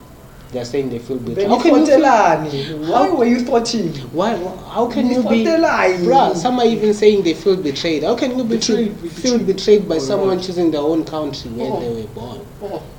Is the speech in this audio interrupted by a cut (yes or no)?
no